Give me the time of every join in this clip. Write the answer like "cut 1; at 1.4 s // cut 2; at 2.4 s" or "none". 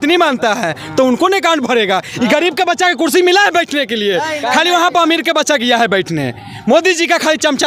none